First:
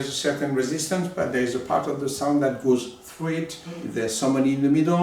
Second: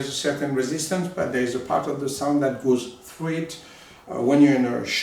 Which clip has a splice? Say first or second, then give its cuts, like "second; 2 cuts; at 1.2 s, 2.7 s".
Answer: first; 1 cut; at 3.9 s